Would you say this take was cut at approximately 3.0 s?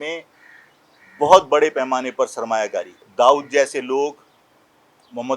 yes; 1 cut; at 3.0 s

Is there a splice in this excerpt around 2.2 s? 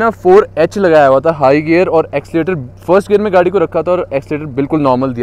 no; 0 cuts

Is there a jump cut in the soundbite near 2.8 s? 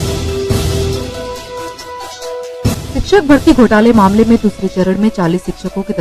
no; 1 cut; at 1.4 s

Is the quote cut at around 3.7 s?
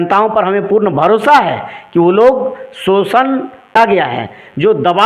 yes; 1 cut; at 3.7 s

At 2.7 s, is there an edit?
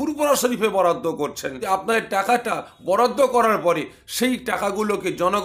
no; 1 cut; at 1.5 s

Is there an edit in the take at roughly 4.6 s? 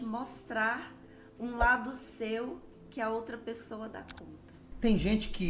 yes; 1 cut; at 4.6 s

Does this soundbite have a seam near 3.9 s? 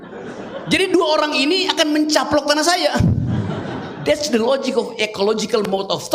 no; 0 cuts

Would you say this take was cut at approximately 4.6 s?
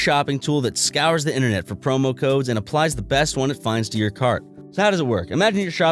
yes; 1 cut; at 4.6 s

